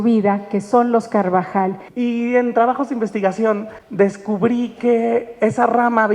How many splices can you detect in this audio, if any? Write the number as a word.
two